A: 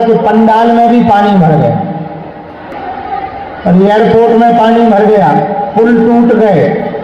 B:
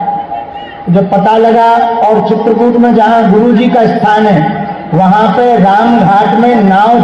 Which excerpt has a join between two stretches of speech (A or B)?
A